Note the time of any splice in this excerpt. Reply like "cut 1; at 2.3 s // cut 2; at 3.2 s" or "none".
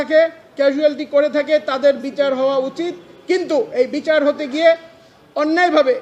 none